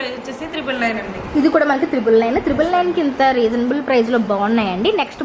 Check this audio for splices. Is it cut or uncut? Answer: uncut